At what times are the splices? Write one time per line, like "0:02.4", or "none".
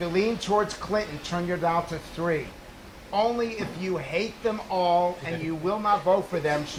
none